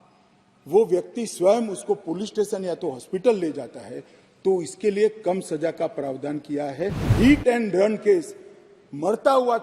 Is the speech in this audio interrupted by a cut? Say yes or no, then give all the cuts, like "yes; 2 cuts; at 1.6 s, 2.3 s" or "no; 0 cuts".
yes; 1 cut; at 7.1 s